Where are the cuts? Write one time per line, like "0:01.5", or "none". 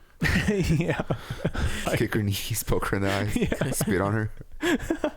0:01.8